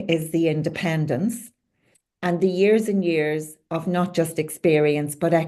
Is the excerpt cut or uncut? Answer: uncut